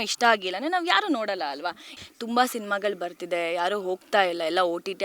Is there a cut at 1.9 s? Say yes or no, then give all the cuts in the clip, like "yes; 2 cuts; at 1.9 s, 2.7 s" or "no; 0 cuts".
yes; 1 cut; at 1.9 s